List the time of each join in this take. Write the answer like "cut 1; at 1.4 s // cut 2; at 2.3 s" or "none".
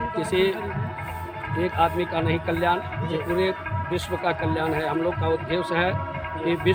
none